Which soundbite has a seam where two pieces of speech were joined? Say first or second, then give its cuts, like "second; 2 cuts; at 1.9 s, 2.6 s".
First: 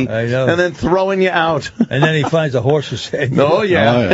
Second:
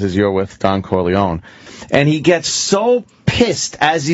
second; 1 cut; at 1.6 s